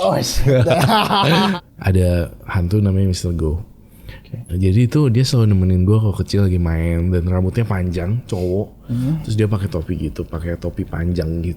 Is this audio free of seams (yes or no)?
no